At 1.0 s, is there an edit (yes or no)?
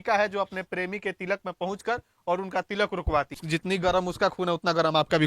no